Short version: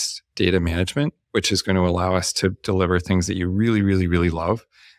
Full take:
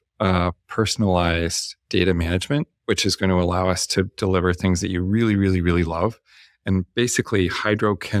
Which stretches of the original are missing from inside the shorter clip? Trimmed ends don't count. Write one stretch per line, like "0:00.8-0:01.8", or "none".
none